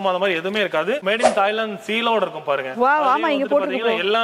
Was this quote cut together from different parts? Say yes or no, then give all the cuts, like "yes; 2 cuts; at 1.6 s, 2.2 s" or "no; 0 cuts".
yes; 1 cut; at 1.0 s